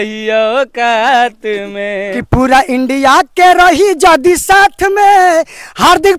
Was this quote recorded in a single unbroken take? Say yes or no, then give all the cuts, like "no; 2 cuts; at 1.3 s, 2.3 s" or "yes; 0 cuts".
no; 1 cut; at 2.1 s